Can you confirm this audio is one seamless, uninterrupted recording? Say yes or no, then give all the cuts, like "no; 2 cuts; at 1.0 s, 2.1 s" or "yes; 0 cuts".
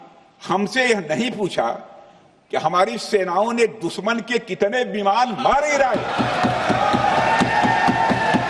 yes; 0 cuts